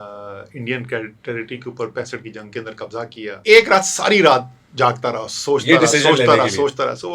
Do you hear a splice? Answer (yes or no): yes